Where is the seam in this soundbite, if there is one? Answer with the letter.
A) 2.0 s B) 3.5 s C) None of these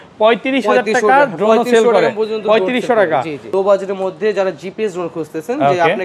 B